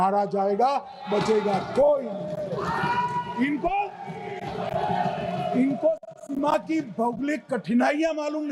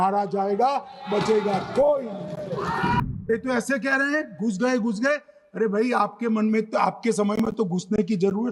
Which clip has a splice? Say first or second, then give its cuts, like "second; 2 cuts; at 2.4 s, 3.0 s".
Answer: second; 1 cut; at 3.1 s